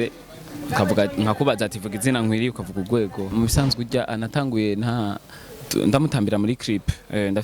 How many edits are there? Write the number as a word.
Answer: one